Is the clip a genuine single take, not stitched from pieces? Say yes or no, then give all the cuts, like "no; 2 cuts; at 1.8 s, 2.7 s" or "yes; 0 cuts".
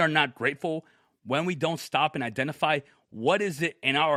yes; 0 cuts